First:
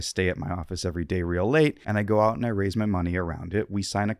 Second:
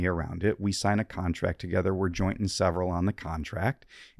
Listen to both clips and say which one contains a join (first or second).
first